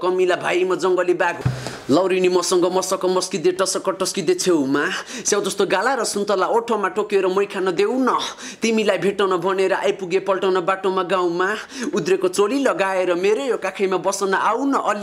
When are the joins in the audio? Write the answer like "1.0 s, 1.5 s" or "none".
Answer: 1.4 s